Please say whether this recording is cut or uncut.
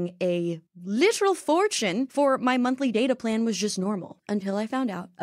cut